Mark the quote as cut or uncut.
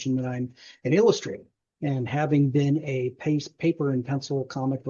uncut